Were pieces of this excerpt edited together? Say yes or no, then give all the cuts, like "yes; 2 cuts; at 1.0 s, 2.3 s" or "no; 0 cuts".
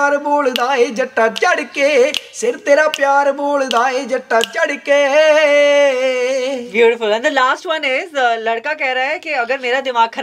no; 0 cuts